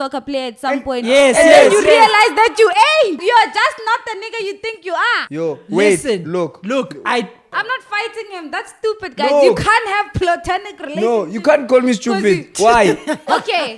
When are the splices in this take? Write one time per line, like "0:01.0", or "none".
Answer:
0:03.2
0:05.2
0:07.6